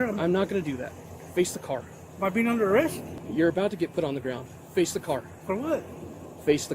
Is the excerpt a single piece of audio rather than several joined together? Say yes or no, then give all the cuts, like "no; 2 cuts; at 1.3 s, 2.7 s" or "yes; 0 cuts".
no; 2 cuts; at 2.0 s, 3.2 s